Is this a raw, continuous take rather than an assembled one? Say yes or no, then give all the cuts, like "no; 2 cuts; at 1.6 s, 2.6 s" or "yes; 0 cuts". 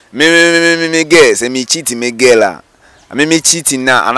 yes; 0 cuts